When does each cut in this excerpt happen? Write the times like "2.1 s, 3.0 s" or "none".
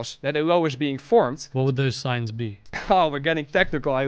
1.4 s, 2.7 s